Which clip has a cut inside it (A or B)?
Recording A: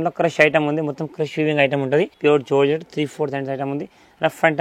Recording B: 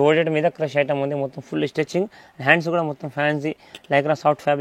A